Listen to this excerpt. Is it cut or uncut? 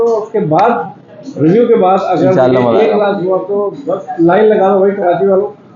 uncut